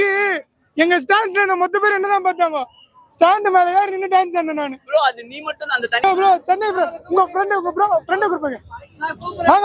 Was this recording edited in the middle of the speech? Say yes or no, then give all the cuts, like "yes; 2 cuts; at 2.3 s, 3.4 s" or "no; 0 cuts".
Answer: yes; 1 cut; at 6.0 s